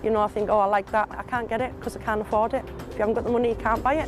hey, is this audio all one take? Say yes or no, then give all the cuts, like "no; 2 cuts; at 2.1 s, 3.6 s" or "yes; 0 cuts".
no; 2 cuts; at 1.2 s, 2.8 s